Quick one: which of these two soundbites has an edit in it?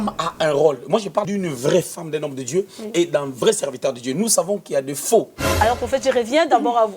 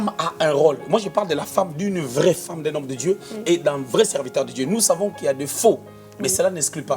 first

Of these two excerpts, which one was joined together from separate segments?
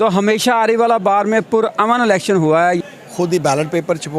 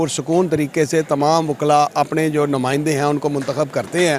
first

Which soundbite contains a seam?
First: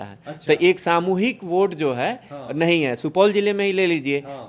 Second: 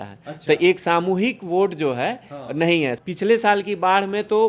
second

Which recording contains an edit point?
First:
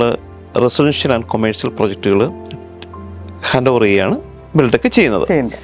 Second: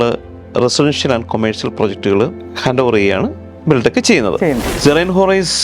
second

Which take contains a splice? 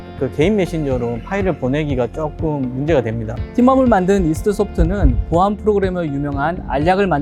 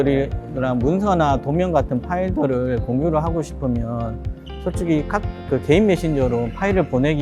first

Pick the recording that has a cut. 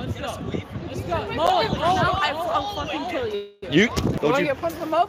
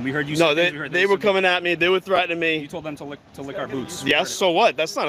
first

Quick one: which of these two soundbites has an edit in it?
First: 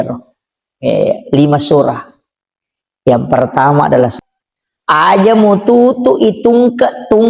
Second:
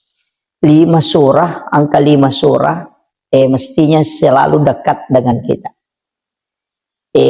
first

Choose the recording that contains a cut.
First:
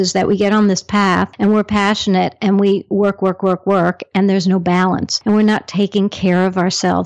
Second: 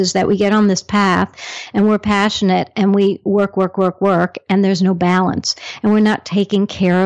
first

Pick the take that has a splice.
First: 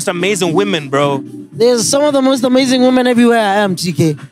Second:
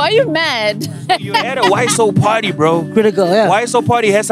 second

